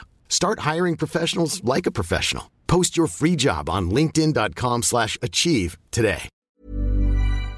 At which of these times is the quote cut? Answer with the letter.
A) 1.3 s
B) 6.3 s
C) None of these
B